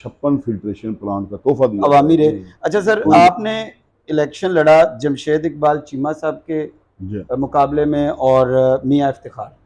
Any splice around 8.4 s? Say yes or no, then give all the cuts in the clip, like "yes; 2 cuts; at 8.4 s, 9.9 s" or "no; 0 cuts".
no; 1 cut; at 1.8 s